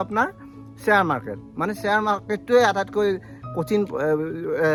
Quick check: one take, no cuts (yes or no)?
yes